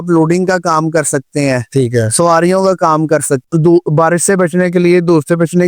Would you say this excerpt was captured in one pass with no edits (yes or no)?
no